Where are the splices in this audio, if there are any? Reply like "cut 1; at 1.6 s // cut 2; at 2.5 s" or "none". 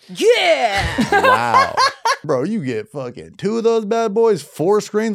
cut 1; at 2.2 s